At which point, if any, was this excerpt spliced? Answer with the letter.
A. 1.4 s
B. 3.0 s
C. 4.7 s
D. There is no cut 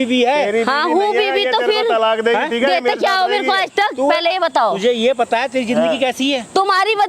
D